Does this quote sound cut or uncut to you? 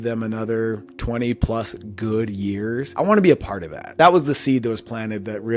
cut